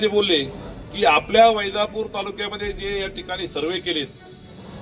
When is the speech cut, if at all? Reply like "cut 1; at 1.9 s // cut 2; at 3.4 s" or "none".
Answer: none